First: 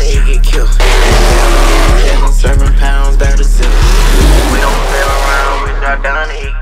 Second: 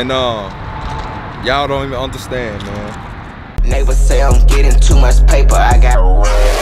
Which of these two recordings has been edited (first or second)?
second